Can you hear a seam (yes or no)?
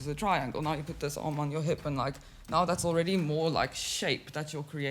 no